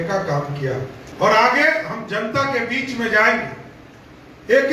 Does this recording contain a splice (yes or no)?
yes